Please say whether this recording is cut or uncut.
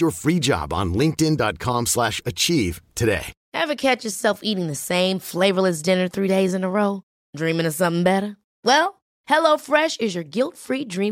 cut